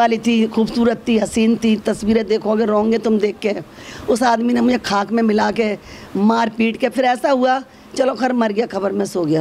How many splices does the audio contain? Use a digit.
0